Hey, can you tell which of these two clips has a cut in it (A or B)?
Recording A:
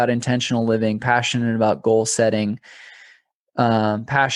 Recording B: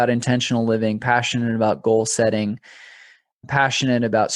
B